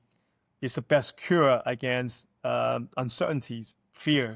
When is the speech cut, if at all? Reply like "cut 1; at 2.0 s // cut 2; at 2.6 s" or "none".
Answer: none